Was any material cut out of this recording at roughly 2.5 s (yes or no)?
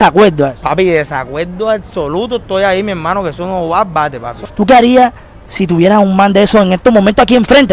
no